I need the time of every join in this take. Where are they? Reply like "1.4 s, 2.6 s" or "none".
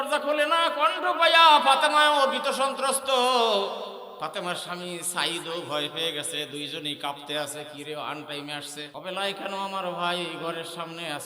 8.9 s